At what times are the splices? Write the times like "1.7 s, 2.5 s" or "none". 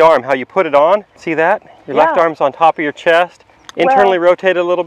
1.2 s